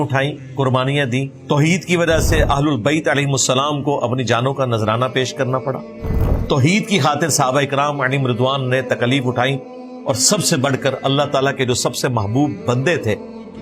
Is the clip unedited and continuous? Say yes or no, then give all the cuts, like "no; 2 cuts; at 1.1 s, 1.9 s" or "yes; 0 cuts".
no; 1 cut; at 1.4 s